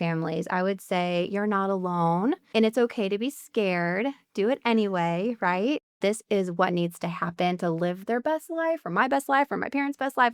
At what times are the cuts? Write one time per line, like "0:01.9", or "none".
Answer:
0:02.4
0:05.9